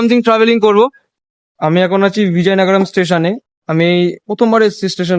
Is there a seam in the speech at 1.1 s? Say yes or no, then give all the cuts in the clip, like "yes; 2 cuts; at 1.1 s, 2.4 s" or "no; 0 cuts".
yes; 1 cut; at 1.1 s